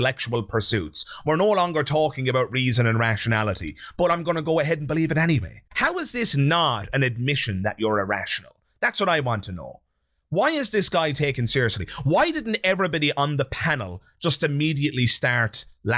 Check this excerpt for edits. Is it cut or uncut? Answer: uncut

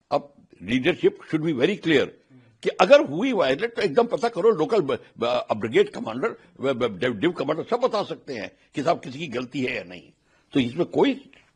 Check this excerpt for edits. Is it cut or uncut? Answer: uncut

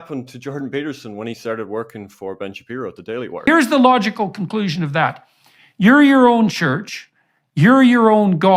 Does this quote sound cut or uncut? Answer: uncut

